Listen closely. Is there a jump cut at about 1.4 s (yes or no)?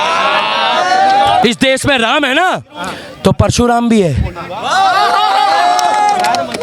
yes